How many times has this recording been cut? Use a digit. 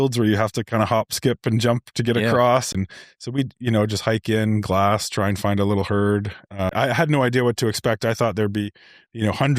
2